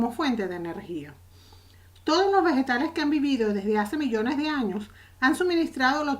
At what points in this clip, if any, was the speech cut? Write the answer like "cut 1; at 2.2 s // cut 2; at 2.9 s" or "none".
cut 1; at 3.8 s